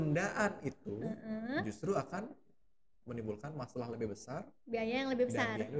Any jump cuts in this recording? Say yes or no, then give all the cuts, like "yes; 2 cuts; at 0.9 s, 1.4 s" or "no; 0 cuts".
no; 0 cuts